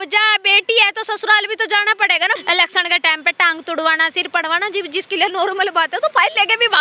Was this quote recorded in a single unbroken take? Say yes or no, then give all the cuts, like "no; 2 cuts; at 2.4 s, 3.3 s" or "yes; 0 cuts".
no; 1 cut; at 2.4 s